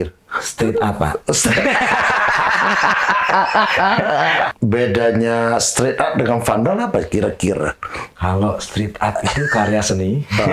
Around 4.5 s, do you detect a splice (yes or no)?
yes